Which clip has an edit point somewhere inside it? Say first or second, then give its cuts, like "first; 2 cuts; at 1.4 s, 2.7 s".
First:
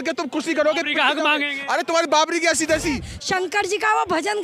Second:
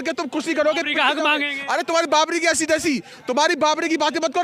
first; 1 cut; at 3.1 s